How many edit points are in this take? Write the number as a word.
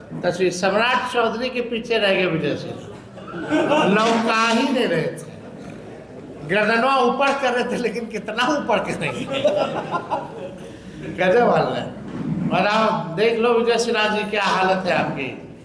zero